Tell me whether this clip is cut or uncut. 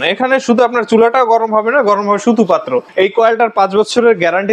cut